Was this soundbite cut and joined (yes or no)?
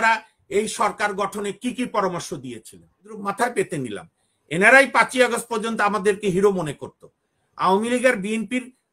yes